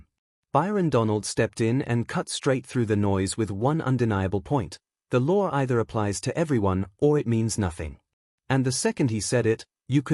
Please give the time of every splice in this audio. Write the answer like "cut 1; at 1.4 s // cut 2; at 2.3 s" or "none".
none